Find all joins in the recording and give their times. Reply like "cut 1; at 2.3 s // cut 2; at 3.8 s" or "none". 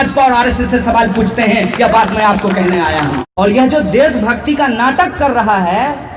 cut 1; at 3.2 s